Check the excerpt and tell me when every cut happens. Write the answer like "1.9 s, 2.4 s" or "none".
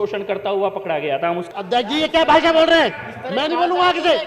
1.5 s